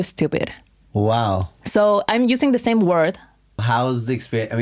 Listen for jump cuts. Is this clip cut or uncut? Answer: cut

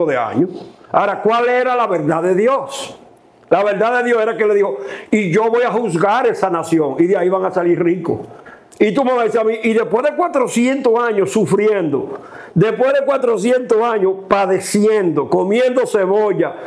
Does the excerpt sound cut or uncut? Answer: uncut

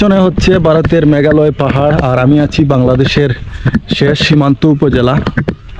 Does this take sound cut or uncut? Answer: uncut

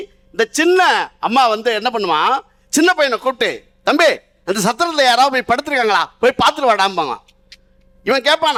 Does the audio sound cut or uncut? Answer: uncut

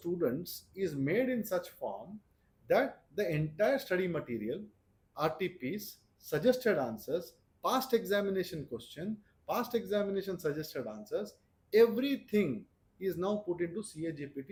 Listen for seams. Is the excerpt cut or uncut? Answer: uncut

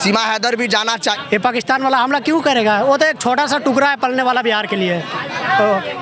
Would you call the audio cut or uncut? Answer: cut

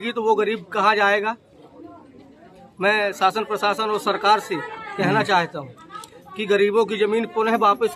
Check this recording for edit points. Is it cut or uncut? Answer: uncut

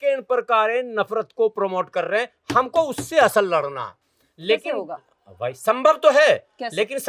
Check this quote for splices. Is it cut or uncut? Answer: uncut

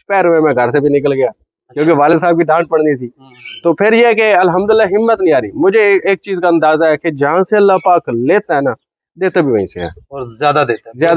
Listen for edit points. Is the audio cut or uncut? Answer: uncut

